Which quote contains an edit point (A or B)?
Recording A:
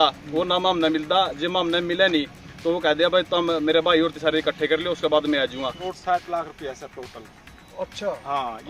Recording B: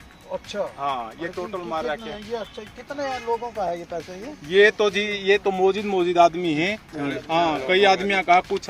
A